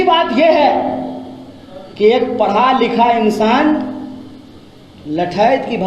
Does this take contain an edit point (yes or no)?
no